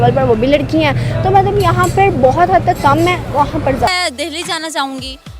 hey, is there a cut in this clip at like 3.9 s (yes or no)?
yes